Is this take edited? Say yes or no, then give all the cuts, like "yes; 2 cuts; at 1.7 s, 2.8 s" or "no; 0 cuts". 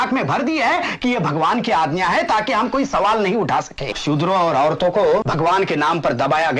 yes; 2 cuts; at 3.9 s, 5.3 s